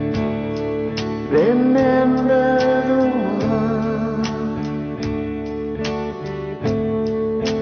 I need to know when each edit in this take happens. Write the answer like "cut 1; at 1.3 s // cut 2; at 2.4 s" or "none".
none